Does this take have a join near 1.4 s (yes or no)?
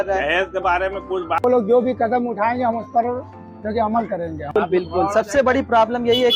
yes